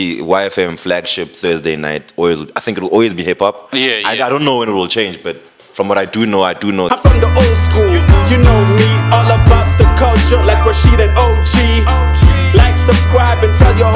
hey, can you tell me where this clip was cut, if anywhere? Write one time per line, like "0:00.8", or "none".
0:06.9